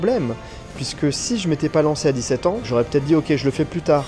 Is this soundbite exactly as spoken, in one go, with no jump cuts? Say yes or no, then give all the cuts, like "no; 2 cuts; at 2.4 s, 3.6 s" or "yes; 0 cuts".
no; 1 cut; at 2.6 s